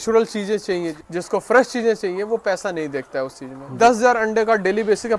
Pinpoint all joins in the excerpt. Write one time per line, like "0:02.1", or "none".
0:01.0
0:03.7

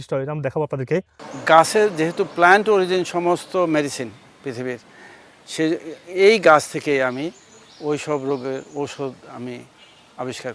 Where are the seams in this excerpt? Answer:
0:01.2

